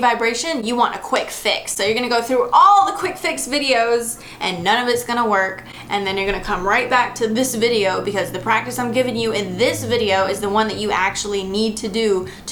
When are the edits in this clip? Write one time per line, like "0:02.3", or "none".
none